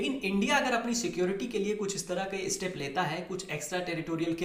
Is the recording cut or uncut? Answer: uncut